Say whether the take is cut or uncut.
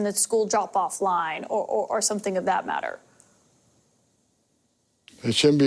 uncut